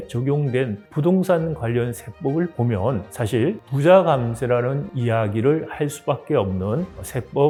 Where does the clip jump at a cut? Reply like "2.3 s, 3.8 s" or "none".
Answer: none